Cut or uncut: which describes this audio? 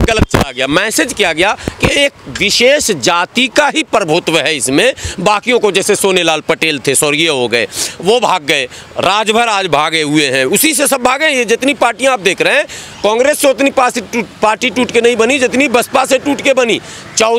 uncut